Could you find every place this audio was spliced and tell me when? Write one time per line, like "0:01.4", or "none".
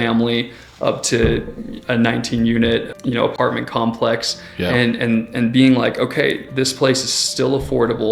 0:02.9